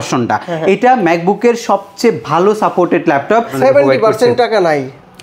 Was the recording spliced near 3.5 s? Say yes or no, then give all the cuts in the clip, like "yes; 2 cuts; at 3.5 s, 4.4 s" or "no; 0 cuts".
yes; 1 cut; at 3.5 s